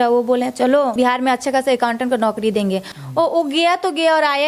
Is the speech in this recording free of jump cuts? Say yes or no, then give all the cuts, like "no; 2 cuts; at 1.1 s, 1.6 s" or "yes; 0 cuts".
no; 2 cuts; at 0.9 s, 2.9 s